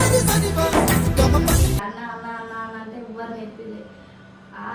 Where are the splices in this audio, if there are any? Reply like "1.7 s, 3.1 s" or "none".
1.8 s